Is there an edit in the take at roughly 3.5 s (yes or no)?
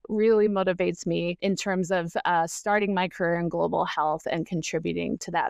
no